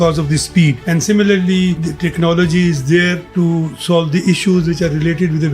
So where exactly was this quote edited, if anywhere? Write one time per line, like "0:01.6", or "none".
0:00.8
0:01.9
0:03.2